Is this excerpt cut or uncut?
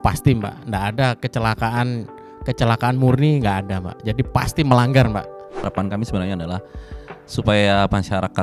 cut